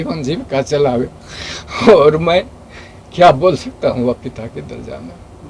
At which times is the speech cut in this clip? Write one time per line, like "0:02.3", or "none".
none